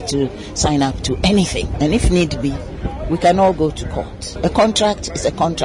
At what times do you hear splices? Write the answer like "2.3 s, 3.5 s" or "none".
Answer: 1.7 s, 4.2 s

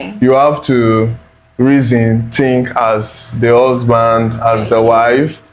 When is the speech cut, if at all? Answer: none

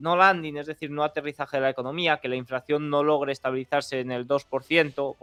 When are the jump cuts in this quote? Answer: none

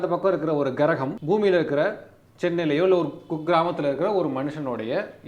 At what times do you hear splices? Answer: 1.1 s

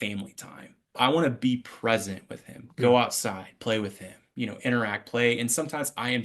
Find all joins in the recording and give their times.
0.9 s

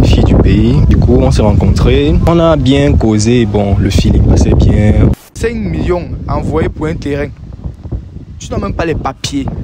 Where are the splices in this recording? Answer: 0.9 s, 2.2 s, 5.1 s

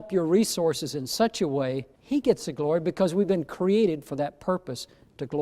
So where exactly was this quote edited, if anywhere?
1.9 s

